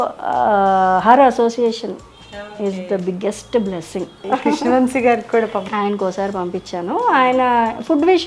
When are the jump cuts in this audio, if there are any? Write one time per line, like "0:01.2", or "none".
0:04.2
0:05.6